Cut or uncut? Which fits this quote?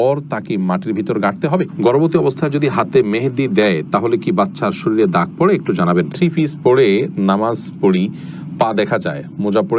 cut